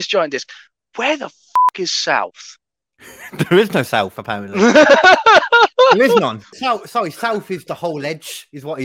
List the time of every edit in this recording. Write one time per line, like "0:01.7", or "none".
0:06.5